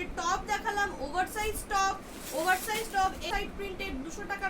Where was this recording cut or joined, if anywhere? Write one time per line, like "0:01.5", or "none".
0:03.2